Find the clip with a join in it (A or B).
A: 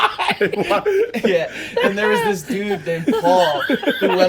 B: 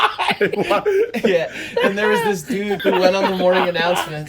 B